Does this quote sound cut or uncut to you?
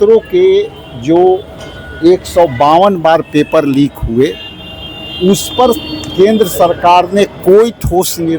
uncut